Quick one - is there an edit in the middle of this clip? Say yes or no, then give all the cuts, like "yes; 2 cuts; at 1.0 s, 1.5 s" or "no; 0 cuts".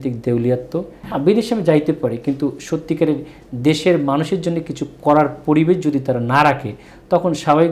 yes; 1 cut; at 1.0 s